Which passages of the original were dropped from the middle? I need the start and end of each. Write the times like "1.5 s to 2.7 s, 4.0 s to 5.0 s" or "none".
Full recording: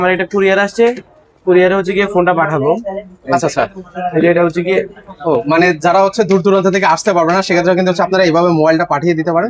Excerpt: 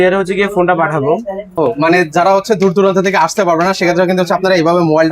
3.0 s to 5.1 s